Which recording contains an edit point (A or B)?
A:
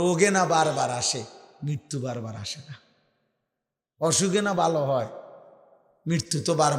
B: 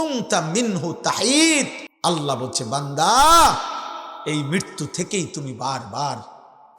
B